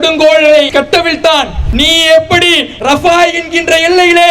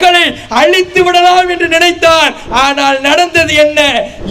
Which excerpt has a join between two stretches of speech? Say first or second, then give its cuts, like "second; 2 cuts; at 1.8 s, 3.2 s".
first; 2 cuts; at 1.2 s, 2.7 s